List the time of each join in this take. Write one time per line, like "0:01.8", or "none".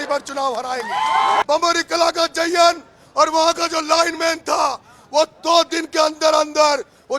0:01.4